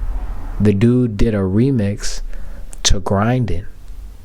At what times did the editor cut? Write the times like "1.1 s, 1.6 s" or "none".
none

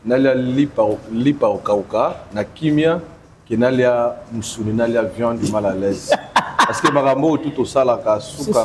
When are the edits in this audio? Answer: none

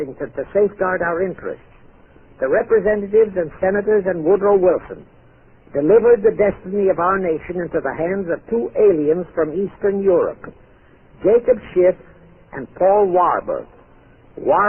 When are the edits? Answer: none

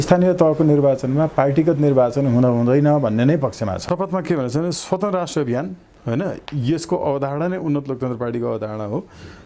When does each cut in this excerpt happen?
3.8 s

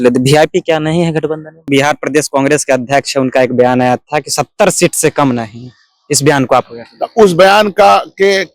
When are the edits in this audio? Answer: 1.6 s

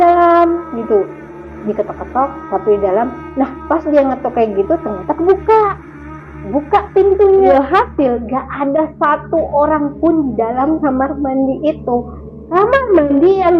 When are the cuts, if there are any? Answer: 7.5 s

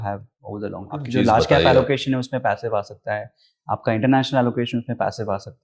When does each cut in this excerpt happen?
1.0 s

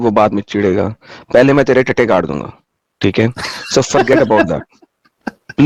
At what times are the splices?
none

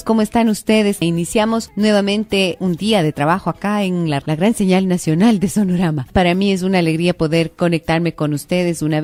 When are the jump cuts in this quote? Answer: none

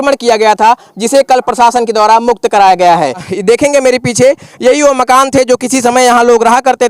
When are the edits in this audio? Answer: 3.3 s

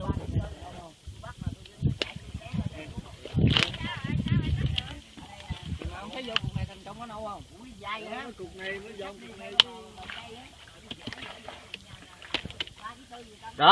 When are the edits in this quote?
none

